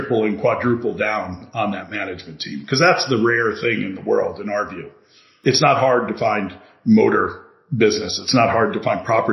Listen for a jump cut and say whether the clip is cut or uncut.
cut